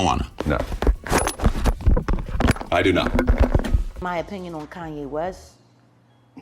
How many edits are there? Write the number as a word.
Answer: one